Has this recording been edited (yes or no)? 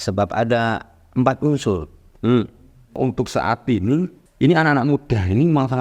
yes